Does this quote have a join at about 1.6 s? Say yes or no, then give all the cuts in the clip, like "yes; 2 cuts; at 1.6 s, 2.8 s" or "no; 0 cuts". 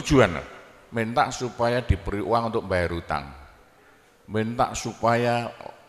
no; 0 cuts